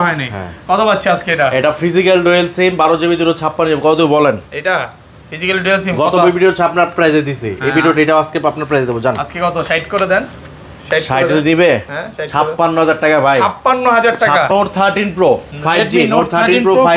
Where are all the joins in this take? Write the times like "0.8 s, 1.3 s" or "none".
14.5 s